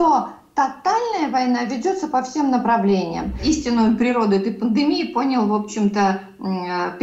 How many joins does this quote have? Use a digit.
1